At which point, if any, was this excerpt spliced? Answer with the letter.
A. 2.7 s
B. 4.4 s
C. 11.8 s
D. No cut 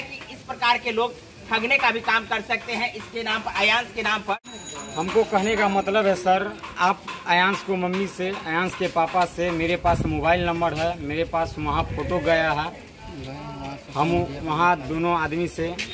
B